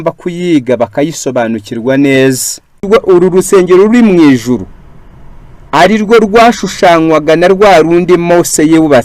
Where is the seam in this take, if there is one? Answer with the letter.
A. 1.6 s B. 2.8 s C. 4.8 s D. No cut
B